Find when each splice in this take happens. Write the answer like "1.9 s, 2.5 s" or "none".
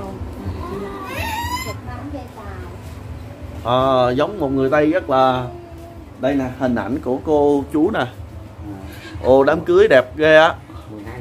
1.7 s